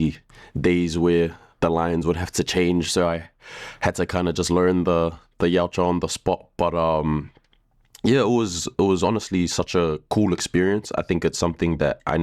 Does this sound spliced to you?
no; 0 cuts

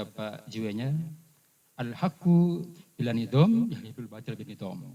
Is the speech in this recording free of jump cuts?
yes; 0 cuts

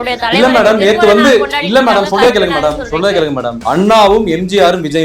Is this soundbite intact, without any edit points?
no; 1 cut; at 3.5 s

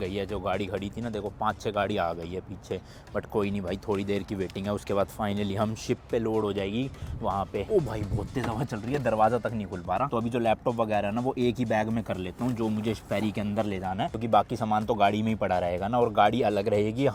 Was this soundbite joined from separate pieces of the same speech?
no; 0 cuts

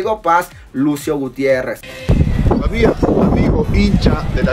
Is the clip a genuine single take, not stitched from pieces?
no; 1 cut; at 1.8 s

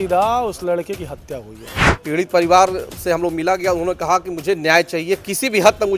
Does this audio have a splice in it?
yes; 1 cut; at 1.9 s

